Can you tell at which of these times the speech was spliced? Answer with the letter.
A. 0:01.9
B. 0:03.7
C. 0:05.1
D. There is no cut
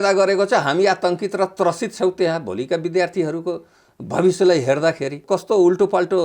C